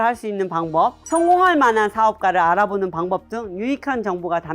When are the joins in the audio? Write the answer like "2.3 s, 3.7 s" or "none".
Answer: 1.0 s